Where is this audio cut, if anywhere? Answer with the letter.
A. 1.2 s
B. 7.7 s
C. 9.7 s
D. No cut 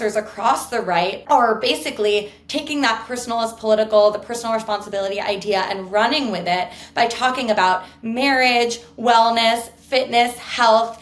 A